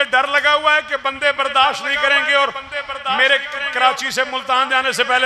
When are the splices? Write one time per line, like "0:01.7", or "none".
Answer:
none